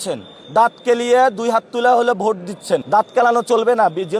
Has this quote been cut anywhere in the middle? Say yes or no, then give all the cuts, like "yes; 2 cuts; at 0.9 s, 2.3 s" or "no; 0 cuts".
yes; 1 cut; at 2.8 s